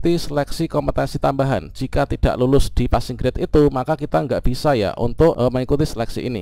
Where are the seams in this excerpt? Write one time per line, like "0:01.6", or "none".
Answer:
0:05.4